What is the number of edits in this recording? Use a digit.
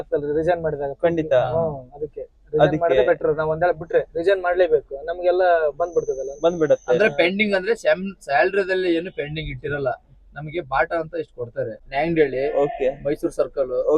1